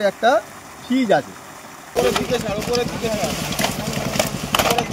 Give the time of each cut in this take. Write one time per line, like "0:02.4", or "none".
0:01.8